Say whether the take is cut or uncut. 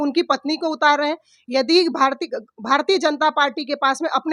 uncut